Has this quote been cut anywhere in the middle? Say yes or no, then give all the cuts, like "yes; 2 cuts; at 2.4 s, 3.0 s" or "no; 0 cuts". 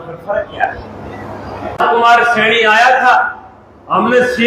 yes; 1 cut; at 1.8 s